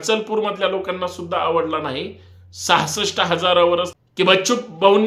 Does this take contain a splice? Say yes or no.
yes